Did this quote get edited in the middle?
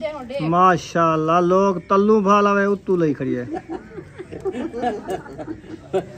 no; 0 cuts

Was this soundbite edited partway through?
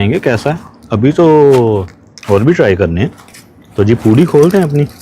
no; 0 cuts

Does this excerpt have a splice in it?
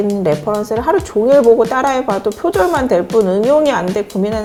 no; 0 cuts

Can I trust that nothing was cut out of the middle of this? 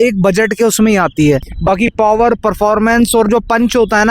no; 1 cut; at 1.5 s

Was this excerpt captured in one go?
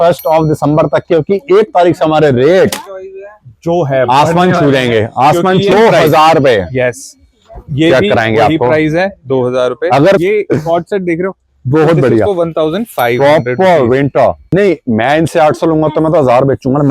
no; 3 cuts; at 5.7 s, 10.2 s, 14.4 s

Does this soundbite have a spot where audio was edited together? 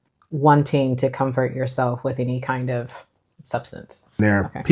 no; 0 cuts

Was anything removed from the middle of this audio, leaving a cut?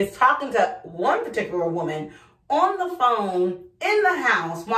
no; 0 cuts

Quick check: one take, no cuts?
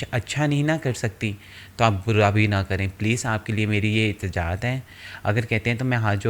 yes; 0 cuts

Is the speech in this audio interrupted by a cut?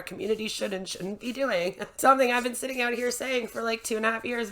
no; 0 cuts

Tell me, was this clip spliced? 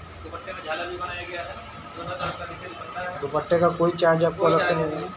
no; 0 cuts

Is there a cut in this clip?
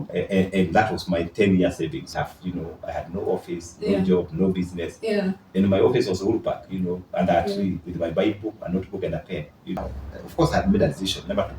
yes; 2 cuts; at 2.1 s, 9.8 s

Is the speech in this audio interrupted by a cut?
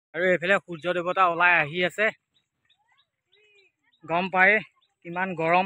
no; 0 cuts

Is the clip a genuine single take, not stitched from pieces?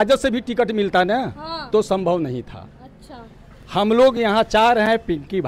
yes; 0 cuts

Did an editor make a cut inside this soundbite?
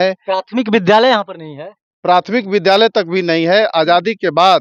no; 0 cuts

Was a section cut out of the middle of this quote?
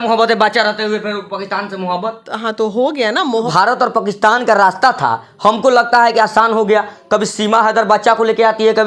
yes; 1 cut; at 3.5 s

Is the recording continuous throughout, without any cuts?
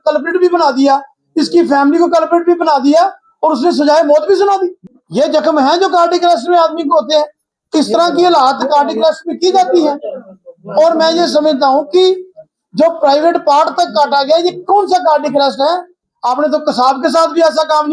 no; 2 cuts; at 4.8 s, 16.0 s

